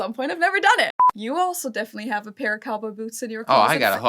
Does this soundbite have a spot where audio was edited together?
yes; 1 cut; at 1.0 s

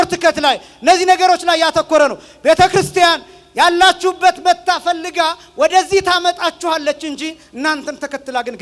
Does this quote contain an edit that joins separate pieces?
no; 0 cuts

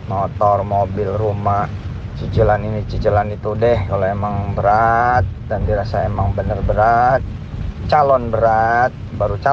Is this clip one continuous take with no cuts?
yes; 0 cuts

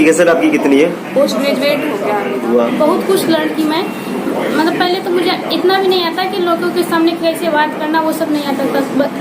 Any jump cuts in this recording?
yes; 1 cut; at 2.4 s

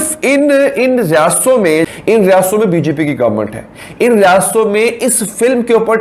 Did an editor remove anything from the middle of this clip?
yes; 1 cut; at 1.9 s

